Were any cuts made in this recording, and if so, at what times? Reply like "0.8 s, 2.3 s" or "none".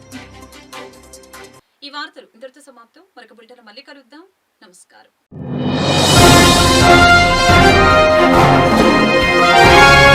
none